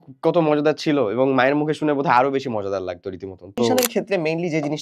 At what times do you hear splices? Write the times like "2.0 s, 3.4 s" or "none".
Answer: 3.7 s